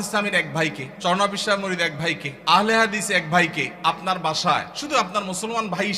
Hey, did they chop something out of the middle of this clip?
yes; 4 cuts; at 0.9 s, 2.3 s, 3.7 s, 4.8 s

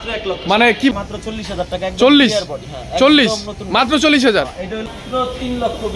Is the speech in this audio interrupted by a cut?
yes; 2 cuts; at 0.9 s, 4.9 s

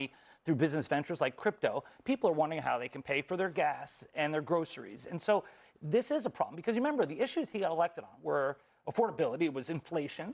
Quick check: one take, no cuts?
yes; 0 cuts

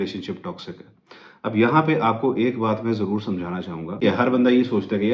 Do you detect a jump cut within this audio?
yes; 1 cut; at 4.0 s

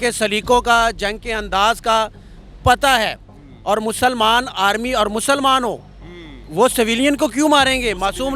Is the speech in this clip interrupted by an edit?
no; 0 cuts

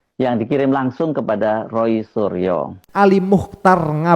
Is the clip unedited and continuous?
no; 1 cut; at 2.8 s

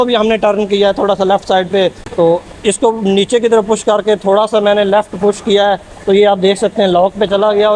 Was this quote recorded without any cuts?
yes; 0 cuts

